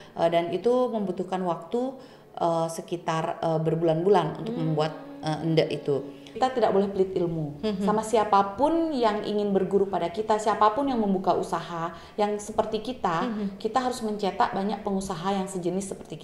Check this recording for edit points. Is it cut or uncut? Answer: cut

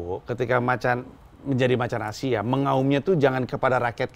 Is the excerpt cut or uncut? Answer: uncut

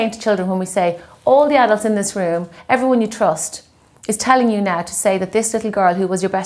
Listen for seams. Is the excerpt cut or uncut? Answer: uncut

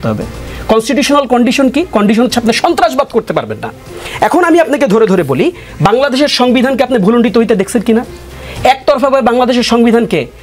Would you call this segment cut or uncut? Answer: uncut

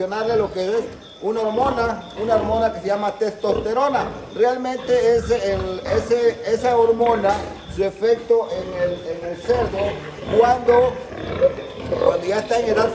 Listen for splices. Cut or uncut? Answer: uncut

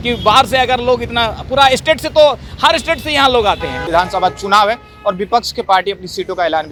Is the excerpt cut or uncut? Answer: uncut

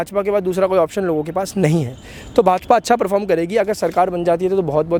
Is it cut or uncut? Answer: uncut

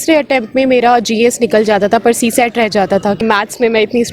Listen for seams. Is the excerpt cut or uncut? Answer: cut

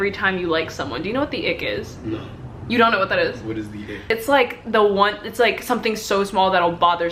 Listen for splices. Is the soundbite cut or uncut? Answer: uncut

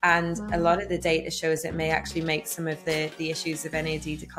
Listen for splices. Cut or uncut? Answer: uncut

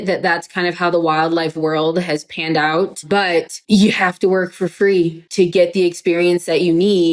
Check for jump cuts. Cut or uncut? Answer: uncut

